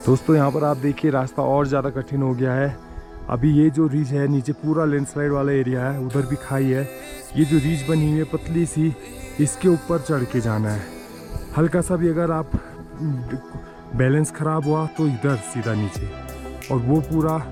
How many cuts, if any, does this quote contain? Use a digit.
0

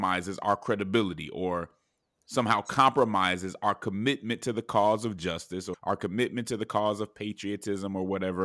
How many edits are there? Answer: 1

